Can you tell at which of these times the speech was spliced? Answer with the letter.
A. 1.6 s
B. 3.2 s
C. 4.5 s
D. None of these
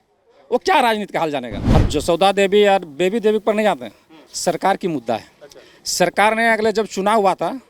A